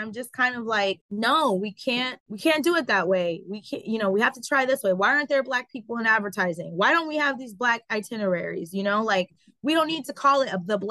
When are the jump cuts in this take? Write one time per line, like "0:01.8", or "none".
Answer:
0:01.0
0:02.2